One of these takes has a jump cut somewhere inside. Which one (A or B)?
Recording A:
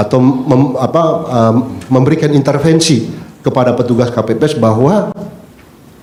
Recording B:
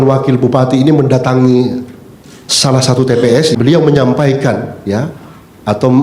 B